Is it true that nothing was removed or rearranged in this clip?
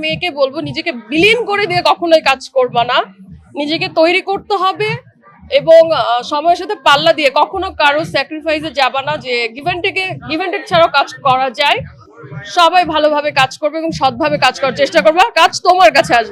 yes; 0 cuts

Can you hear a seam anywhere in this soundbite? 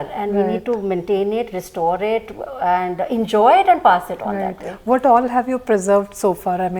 no; 0 cuts

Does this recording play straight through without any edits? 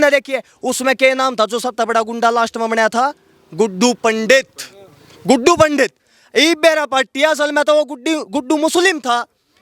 yes; 0 cuts

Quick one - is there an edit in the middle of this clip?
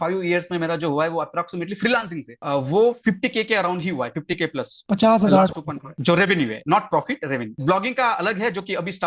no; 0 cuts

